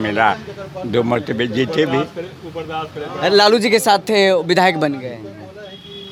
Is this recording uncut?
yes; 0 cuts

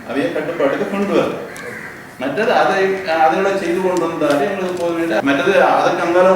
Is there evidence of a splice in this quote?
yes; 1 cut; at 5.2 s

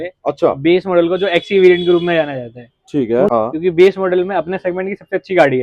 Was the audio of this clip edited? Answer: yes; 1 cut; at 3.3 s

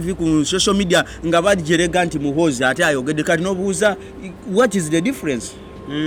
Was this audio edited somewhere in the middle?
no; 0 cuts

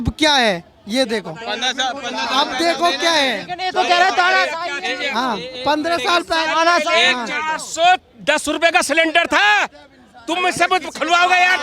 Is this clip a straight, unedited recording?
yes; 0 cuts

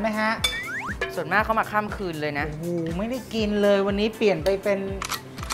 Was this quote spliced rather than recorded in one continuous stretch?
no; 0 cuts

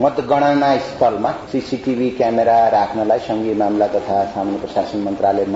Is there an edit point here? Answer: no; 0 cuts

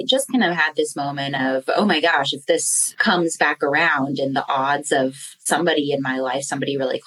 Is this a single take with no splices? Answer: no; 1 cut; at 2.9 s

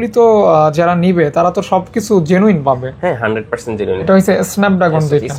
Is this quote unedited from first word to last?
no; 1 cut; at 4.0 s

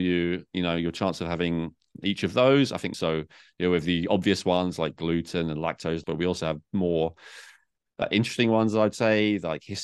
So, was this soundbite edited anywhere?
yes; 4 cuts; at 1.9 s, 2.9 s, 6.0 s, 8.0 s

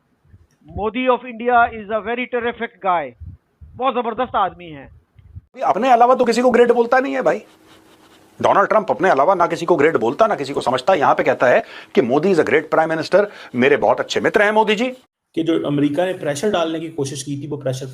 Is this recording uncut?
no; 2 cuts; at 5.6 s, 15.0 s

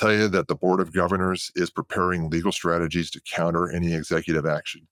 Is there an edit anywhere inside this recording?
no; 0 cuts

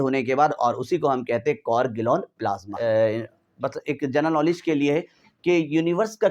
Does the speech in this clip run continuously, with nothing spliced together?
no; 1 cut; at 2.8 s

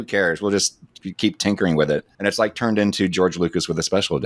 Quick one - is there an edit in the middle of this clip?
yes; 1 cut; at 2.1 s

